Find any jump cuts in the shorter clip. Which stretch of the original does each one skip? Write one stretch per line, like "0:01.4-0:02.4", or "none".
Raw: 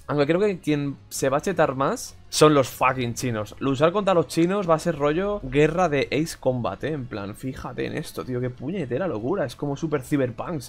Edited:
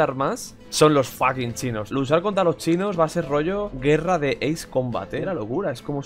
0:03.4-0:03.5
0:06.9-0:09.0